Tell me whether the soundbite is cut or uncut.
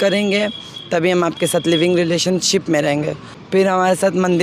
cut